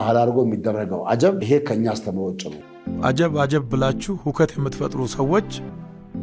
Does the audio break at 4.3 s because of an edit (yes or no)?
no